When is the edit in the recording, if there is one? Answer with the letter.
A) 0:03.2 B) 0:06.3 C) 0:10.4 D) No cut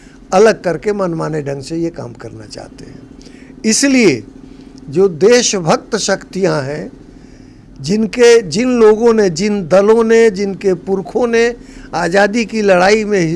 D